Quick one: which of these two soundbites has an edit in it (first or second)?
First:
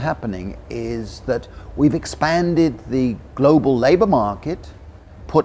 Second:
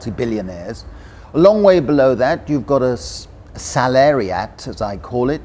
first